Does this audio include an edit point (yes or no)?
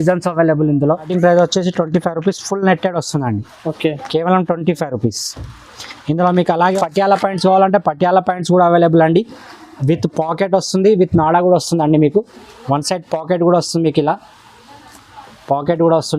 yes